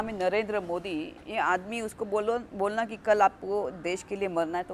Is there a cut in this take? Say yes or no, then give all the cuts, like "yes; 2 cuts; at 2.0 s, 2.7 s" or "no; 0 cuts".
no; 0 cuts